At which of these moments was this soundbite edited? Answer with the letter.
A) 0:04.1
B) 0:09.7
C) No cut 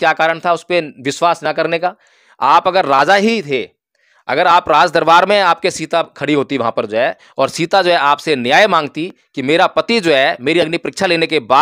C